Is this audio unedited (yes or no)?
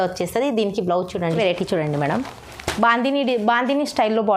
no